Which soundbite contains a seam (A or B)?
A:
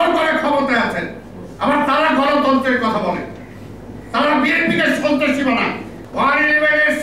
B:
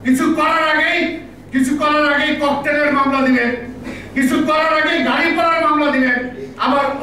A